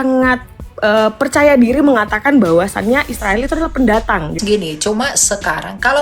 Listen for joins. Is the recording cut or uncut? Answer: cut